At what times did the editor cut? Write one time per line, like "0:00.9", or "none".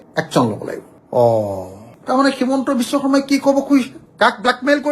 none